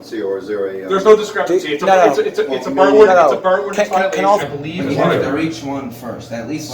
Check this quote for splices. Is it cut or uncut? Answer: cut